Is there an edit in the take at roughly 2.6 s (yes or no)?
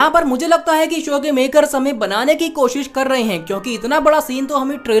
no